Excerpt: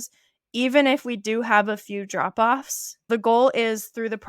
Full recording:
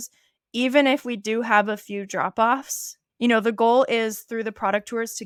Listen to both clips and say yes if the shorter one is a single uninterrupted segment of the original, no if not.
no